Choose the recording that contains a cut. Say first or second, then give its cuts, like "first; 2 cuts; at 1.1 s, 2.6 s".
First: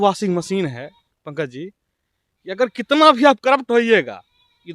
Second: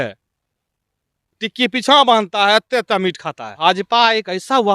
second; 1 cut; at 3.5 s